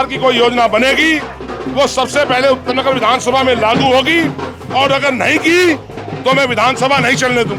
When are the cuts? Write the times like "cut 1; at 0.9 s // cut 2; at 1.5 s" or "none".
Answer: none